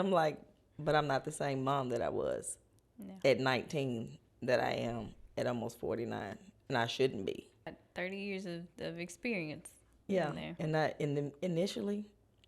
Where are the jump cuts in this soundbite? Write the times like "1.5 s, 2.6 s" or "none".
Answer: 7.7 s